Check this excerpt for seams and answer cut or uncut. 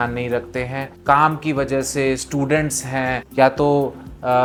uncut